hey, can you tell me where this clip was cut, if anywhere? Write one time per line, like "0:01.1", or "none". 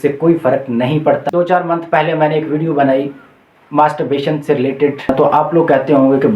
0:01.2
0:05.1

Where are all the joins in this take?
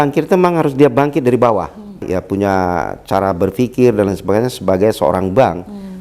0:02.0

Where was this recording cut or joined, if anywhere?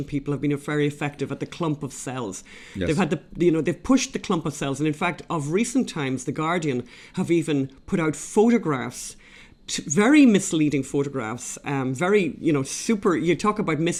none

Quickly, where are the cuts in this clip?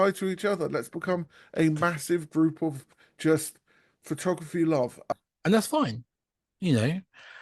0:05.1

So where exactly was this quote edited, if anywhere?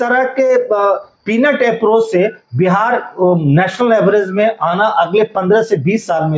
none

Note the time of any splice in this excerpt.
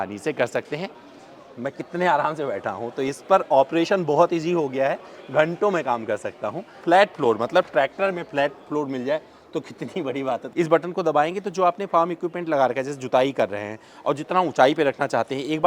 0:01.0
0:06.8
0:10.5

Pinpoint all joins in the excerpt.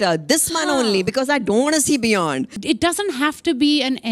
0:02.5

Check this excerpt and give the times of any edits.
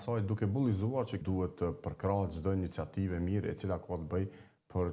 0:01.2

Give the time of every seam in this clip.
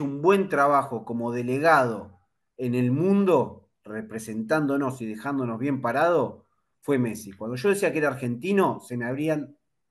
none

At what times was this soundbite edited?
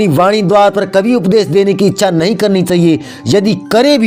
none

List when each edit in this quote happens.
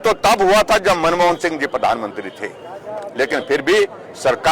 none

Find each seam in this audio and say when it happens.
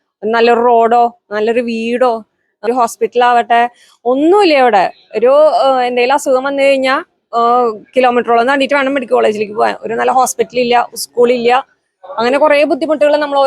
0:02.6

